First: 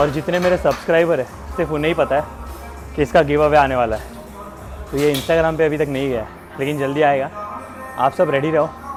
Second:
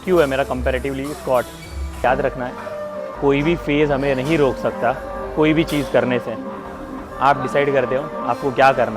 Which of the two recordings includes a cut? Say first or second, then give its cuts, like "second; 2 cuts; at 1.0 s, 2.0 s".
second; 1 cut; at 2.0 s